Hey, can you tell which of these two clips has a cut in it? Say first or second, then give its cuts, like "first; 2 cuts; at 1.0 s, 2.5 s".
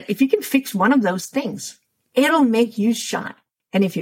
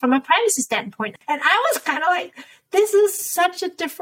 second; 1 cut; at 1.1 s